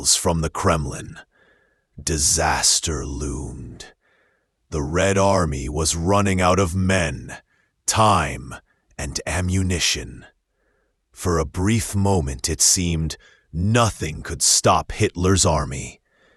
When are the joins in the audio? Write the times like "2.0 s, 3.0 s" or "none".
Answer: none